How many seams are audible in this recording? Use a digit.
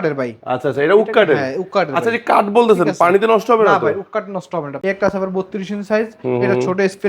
1